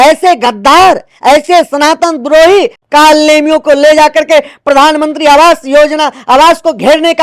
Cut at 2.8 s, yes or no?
yes